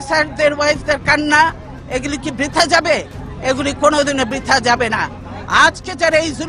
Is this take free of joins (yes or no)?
yes